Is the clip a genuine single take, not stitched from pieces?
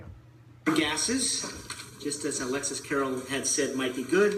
yes; 0 cuts

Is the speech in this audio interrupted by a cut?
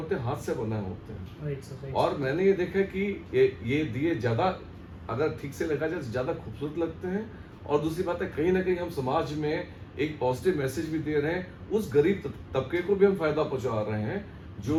no; 0 cuts

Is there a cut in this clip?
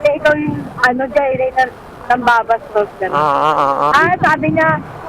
yes; 1 cut; at 3.9 s

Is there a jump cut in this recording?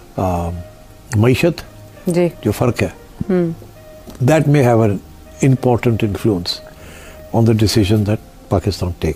no; 0 cuts

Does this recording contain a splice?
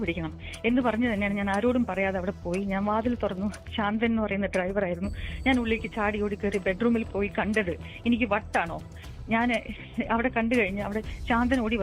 no; 0 cuts

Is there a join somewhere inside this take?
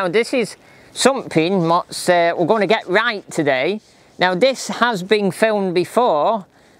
no; 0 cuts

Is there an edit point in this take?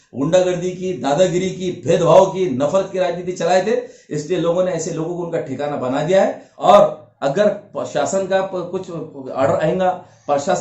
yes; 1 cut; at 6.5 s

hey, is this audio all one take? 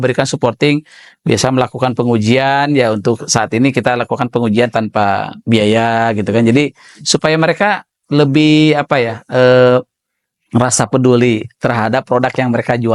yes; 0 cuts

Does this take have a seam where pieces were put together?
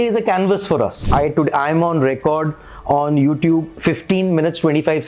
yes; 1 cut; at 1.0 s

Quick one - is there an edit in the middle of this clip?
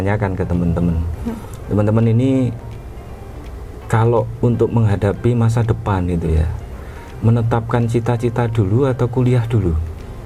no; 0 cuts

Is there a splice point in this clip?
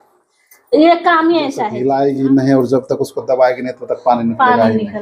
yes; 1 cut; at 1.7 s

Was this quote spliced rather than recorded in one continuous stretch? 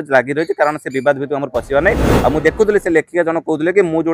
yes; 1 cut; at 2.1 s

